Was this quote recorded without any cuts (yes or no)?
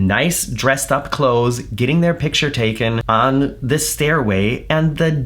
yes